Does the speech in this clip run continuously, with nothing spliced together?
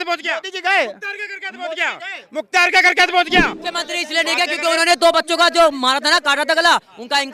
no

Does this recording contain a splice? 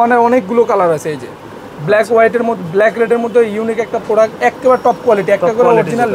no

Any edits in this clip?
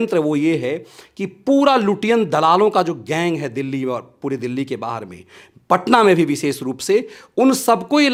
no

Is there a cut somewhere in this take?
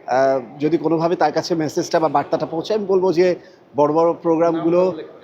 no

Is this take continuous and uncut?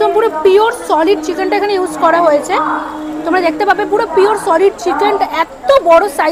yes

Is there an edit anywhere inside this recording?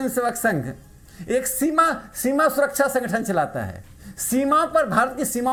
no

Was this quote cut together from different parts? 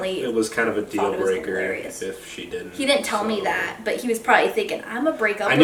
no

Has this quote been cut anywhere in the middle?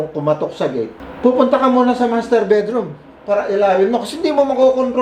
yes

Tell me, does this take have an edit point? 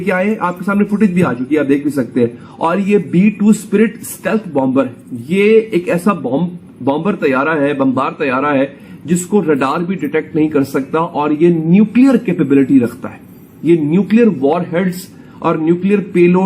no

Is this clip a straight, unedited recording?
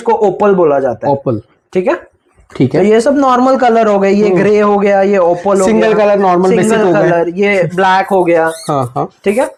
yes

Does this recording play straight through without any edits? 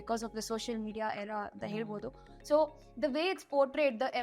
yes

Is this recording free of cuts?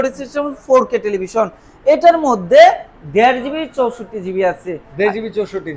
yes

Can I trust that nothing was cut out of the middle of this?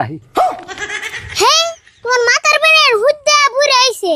yes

